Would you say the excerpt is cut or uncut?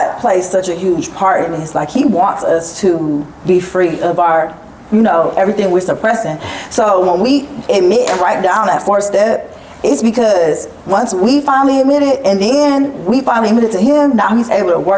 uncut